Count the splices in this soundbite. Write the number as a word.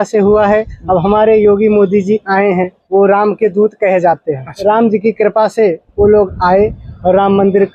two